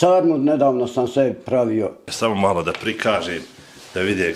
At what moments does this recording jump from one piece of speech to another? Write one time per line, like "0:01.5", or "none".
0:02.0